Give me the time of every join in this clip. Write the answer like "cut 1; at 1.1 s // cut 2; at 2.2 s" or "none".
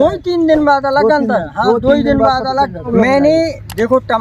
cut 1; at 2.9 s